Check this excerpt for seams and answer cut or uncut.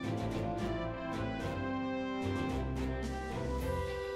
uncut